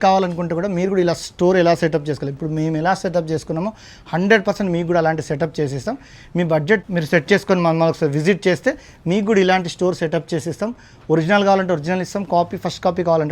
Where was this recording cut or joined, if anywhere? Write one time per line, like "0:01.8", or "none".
0:06.8